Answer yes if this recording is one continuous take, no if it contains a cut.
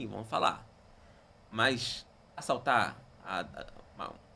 yes